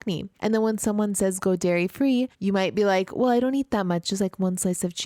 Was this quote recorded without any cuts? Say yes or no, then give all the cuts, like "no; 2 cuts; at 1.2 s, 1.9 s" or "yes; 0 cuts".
no; 1 cut; at 2.3 s